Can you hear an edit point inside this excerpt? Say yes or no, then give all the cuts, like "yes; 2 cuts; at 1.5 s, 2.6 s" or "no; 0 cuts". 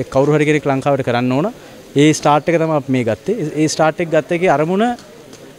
no; 0 cuts